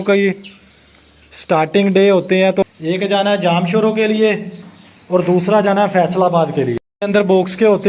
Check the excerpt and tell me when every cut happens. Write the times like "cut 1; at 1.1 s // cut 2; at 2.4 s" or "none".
cut 1; at 2.7 s // cut 2; at 6.9 s